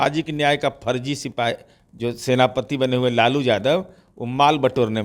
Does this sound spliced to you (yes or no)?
no